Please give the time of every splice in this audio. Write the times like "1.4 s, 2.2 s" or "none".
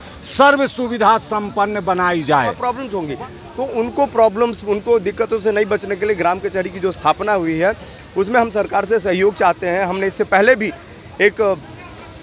2.7 s